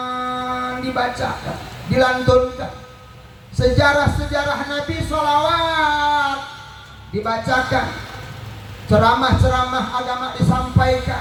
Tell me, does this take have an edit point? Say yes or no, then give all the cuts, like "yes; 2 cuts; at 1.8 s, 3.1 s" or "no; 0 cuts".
no; 0 cuts